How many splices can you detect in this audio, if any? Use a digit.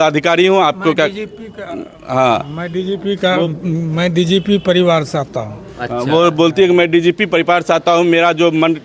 0